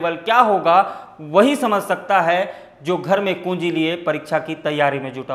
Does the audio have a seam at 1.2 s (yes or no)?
no